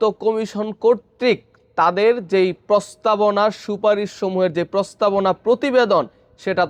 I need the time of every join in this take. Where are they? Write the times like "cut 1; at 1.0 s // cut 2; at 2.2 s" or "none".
none